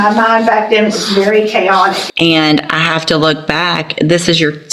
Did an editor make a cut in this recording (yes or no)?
yes